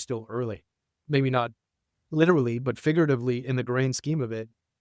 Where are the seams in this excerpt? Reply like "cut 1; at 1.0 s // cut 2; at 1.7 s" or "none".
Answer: cut 1; at 1.0 s